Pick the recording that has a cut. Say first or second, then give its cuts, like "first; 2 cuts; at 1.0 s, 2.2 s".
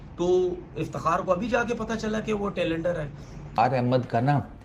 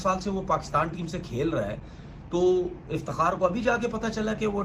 first; 1 cut; at 3.5 s